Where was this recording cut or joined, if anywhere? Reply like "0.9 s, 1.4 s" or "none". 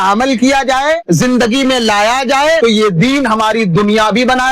1.0 s, 2.6 s